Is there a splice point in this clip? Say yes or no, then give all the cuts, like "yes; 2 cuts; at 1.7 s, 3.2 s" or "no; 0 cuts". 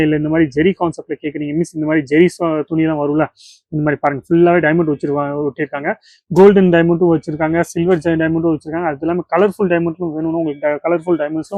no; 0 cuts